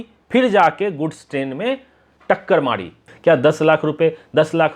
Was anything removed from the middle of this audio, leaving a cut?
yes; 1 cut; at 3.0 s

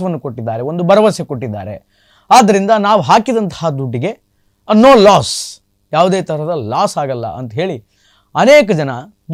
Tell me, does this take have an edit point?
no; 0 cuts

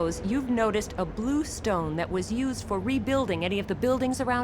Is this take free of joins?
yes; 0 cuts

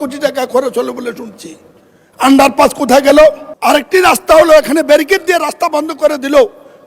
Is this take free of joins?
no; 1 cut; at 3.5 s

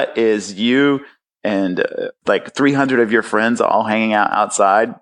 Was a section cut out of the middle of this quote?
yes; 1 cut; at 2.2 s

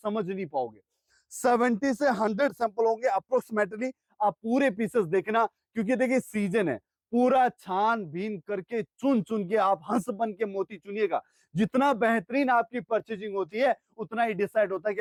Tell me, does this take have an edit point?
no; 0 cuts

